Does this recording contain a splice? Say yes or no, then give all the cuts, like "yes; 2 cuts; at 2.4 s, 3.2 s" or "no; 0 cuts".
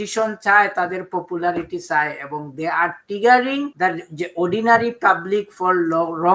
yes; 1 cut; at 3.7 s